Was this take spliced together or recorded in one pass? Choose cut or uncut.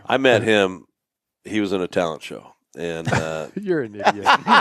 uncut